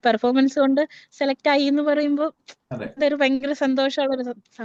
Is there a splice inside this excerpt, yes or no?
no